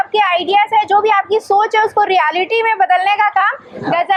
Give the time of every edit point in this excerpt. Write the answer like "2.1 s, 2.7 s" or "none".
none